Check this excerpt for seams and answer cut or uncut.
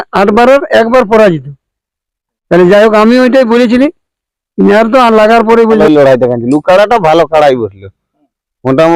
cut